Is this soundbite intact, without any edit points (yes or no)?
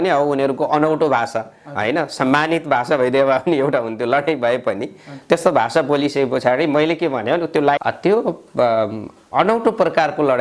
no